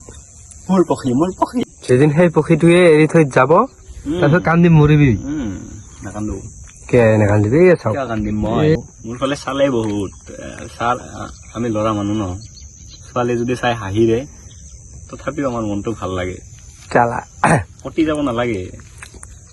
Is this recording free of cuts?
no; 2 cuts; at 1.6 s, 8.8 s

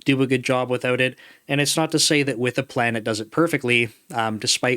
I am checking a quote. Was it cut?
no; 0 cuts

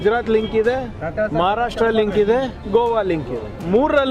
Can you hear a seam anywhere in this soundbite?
yes; 2 cuts; at 1.0 s, 2.6 s

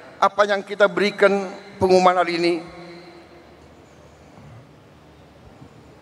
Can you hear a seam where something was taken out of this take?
no; 0 cuts

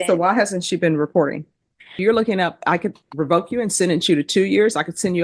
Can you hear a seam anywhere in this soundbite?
yes; 1 cut; at 2.0 s

